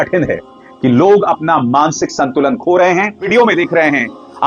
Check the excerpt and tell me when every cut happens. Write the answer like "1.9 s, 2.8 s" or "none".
3.3 s

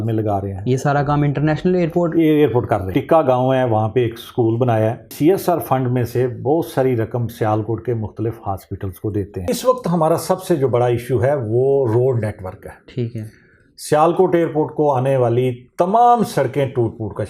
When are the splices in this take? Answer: 2.9 s, 5.1 s, 9.5 s

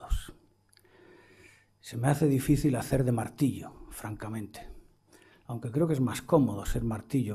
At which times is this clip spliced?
none

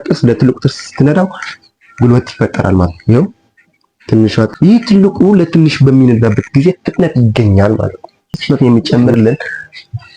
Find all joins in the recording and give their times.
4.5 s, 8.4 s

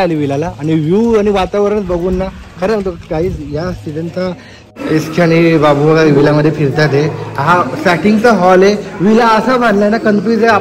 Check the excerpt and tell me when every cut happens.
4.5 s

